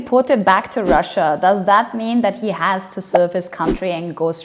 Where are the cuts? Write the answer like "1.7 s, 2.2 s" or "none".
none